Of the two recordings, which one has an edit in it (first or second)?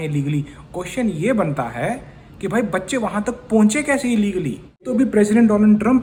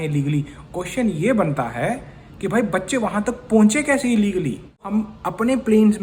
second